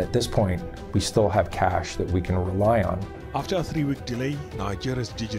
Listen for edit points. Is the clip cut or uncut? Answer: cut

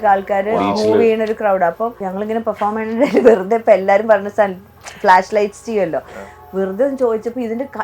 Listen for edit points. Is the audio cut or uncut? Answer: cut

